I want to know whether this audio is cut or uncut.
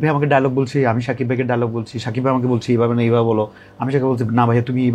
uncut